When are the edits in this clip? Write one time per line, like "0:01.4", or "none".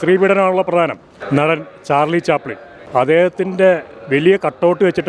0:01.2